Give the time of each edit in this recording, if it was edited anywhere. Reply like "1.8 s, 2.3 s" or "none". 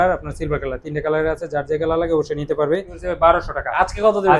2.9 s